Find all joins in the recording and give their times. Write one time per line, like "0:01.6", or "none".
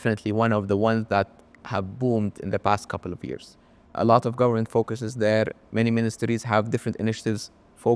none